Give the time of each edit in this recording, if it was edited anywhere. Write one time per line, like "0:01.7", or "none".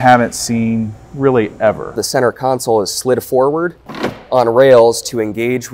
0:02.0